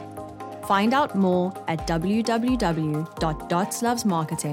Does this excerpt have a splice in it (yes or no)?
no